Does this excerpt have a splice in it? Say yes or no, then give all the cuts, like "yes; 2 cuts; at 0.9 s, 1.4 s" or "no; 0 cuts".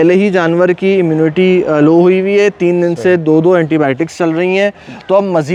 no; 0 cuts